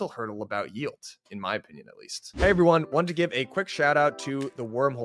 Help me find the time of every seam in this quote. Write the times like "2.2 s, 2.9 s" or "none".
2.4 s